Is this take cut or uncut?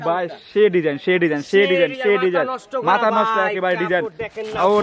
uncut